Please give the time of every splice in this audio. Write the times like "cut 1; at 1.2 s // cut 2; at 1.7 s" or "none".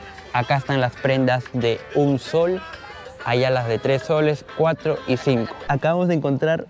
cut 1; at 5.6 s